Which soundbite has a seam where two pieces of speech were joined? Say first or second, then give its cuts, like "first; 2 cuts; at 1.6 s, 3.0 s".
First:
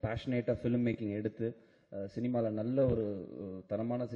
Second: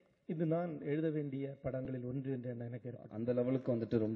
second; 1 cut; at 3.0 s